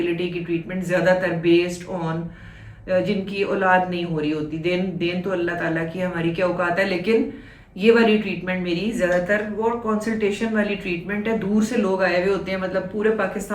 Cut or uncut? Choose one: uncut